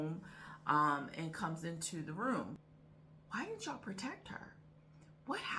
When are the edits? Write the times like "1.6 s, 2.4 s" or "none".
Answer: 2.7 s